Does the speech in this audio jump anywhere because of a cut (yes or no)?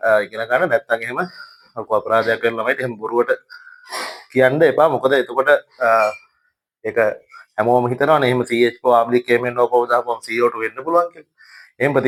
no